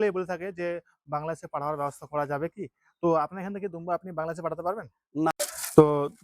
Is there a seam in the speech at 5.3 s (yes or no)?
yes